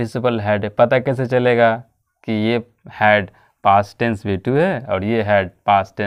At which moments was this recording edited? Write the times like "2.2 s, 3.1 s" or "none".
none